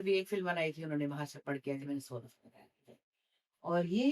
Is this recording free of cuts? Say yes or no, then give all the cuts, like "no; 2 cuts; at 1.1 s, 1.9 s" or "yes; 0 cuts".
yes; 0 cuts